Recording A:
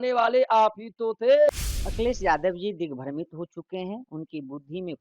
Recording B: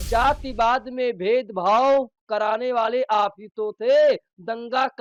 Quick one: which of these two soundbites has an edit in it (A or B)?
A